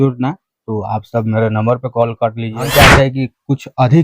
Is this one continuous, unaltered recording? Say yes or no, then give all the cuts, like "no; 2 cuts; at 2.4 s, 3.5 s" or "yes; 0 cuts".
no; 1 cut; at 2.6 s